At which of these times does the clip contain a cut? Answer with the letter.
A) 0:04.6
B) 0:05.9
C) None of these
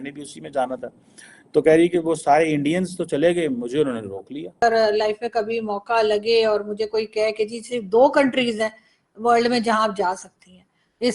A